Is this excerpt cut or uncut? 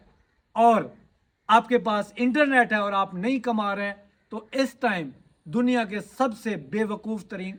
uncut